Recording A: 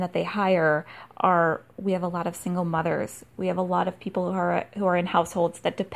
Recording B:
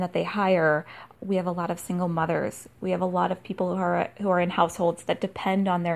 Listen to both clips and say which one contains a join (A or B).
B